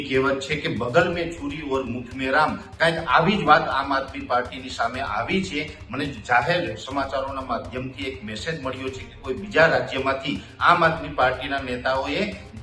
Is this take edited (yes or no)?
no